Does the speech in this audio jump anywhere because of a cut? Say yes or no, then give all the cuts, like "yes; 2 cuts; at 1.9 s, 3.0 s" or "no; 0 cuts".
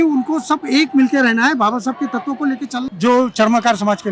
yes; 1 cut; at 2.7 s